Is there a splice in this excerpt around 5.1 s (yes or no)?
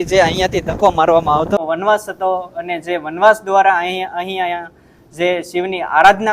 no